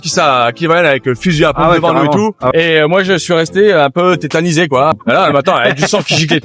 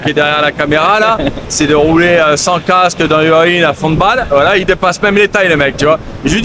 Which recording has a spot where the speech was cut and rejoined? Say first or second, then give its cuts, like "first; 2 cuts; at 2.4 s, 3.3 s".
first; 2 cuts; at 2.5 s, 4.9 s